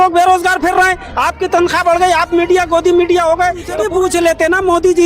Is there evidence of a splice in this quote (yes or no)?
yes